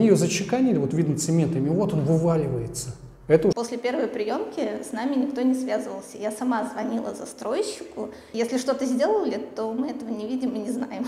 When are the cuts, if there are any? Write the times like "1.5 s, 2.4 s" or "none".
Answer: 3.5 s, 8.2 s

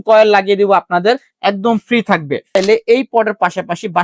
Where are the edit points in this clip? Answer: 2.5 s

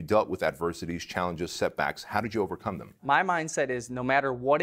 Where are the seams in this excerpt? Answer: 3.0 s

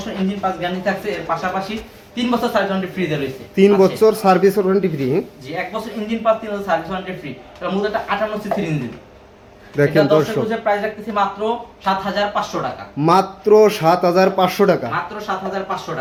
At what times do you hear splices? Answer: none

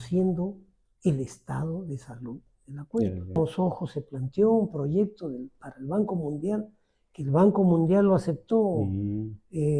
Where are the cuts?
3.4 s

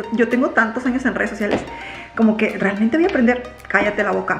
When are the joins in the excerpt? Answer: none

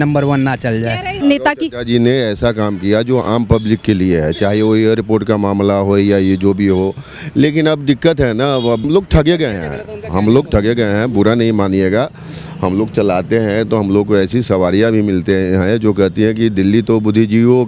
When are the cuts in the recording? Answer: 1.3 s, 8.8 s

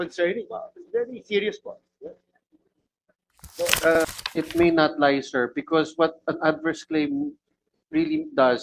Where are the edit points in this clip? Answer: 4.0 s

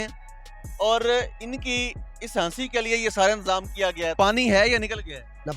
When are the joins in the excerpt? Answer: 4.1 s

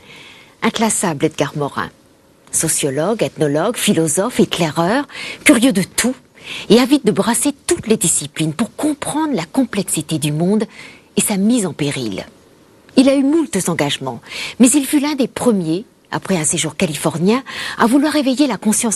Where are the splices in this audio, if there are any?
2.1 s

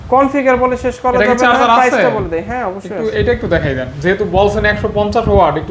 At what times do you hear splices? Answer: none

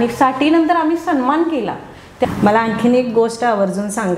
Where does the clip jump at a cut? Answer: 2.2 s

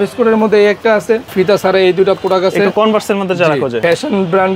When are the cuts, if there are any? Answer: 1.3 s, 3.8 s

